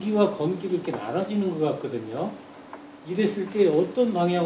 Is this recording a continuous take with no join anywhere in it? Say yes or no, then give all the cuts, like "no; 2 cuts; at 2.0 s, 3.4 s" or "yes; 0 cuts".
yes; 0 cuts